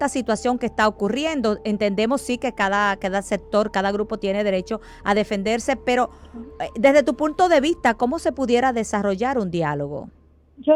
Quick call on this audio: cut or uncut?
uncut